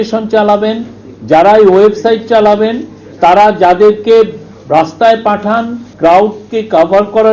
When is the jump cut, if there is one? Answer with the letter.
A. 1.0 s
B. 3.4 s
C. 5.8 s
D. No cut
C